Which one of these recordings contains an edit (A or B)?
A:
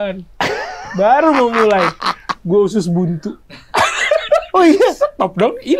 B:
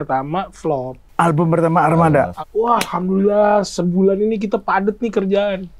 B